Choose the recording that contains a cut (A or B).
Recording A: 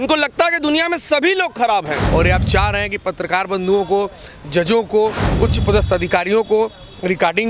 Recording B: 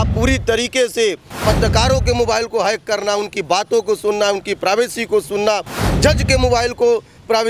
A